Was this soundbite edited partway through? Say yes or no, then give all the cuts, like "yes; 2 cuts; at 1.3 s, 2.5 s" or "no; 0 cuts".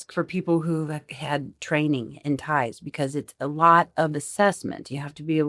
no; 0 cuts